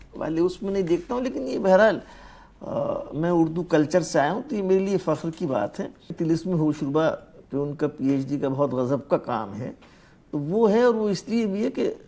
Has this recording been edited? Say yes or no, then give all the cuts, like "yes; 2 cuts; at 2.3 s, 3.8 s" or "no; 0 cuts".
yes; 1 cut; at 6.1 s